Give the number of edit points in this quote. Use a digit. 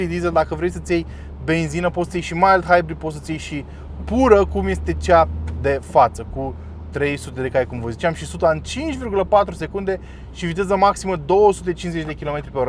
0